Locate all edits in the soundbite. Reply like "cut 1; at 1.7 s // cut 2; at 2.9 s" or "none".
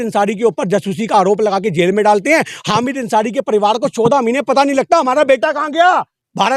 none